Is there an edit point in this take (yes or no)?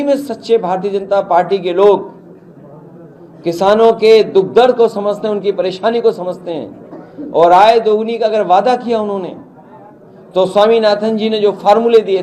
no